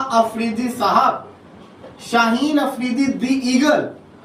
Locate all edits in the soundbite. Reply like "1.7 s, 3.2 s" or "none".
none